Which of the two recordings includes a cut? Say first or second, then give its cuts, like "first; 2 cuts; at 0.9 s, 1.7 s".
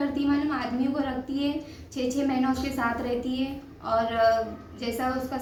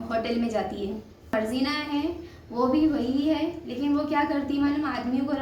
second; 1 cut; at 1.3 s